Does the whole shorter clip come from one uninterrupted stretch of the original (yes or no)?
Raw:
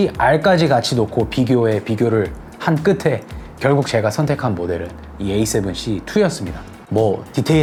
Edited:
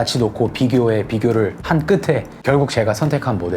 no